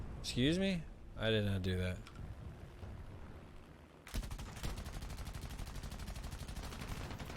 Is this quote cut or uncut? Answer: cut